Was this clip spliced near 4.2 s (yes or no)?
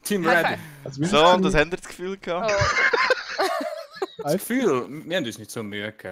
yes